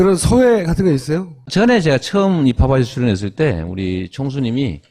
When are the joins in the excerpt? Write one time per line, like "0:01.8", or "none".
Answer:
0:01.3